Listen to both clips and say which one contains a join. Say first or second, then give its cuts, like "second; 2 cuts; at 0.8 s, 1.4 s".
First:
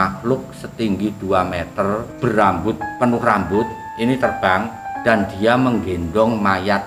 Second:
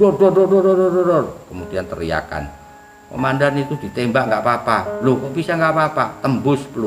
first; 4 cuts; at 2.1 s, 2.9 s, 3.8 s, 4.8 s